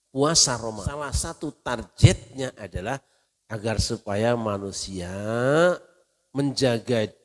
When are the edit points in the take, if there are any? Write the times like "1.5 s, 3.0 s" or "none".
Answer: 1.2 s

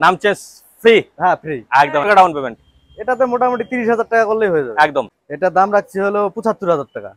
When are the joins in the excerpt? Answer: 2.0 s, 5.2 s

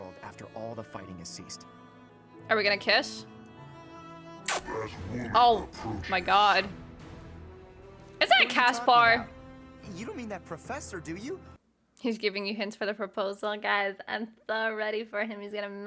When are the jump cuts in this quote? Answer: 2.1 s, 11.5 s

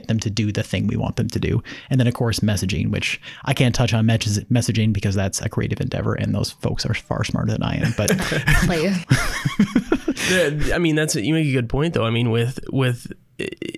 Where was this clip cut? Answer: none

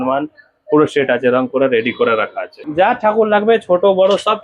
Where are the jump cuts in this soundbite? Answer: 2.6 s

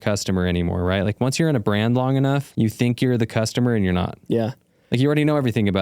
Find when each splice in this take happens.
2.5 s

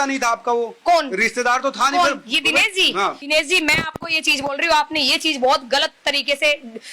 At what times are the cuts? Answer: 3.2 s

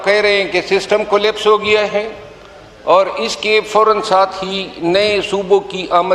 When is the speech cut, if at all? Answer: none

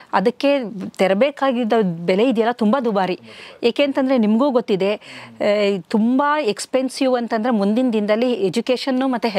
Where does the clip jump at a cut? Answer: none

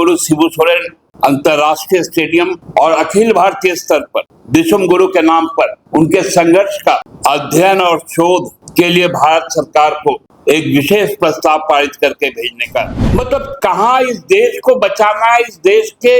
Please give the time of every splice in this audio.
1.0 s, 2.6 s, 4.4 s, 5.8 s, 7.1 s, 8.6 s, 10.3 s, 13.0 s

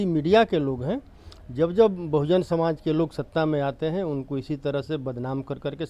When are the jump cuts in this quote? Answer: none

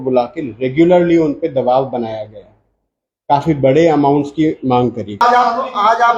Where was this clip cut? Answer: 5.2 s

